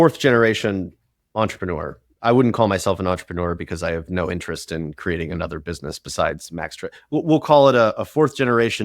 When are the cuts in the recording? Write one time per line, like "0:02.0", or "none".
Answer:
0:02.0